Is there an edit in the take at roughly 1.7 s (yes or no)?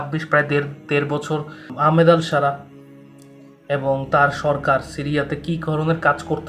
yes